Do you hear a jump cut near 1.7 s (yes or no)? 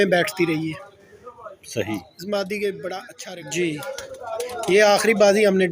no